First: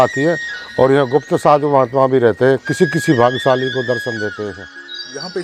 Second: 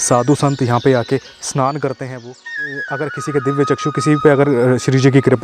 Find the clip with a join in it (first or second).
second